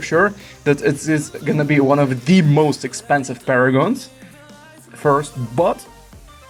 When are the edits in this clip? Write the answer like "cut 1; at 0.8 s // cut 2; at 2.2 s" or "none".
none